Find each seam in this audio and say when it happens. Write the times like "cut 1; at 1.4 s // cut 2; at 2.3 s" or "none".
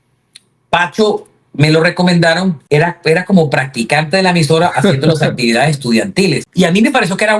cut 1; at 2.6 s // cut 2; at 6.5 s